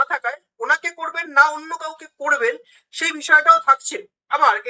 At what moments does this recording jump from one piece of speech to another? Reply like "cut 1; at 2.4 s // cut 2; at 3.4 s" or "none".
none